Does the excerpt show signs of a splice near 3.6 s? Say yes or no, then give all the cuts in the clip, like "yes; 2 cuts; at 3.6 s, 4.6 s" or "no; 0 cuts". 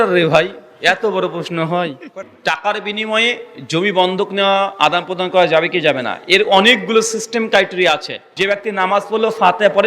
no; 2 cuts; at 2.1 s, 8.3 s